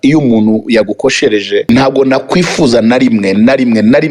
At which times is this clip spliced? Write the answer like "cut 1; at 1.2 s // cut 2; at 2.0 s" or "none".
cut 1; at 1.6 s